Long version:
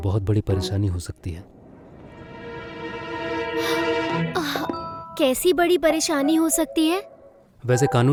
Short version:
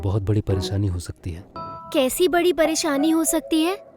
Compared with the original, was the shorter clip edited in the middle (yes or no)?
yes